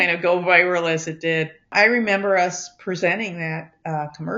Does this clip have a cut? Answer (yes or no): yes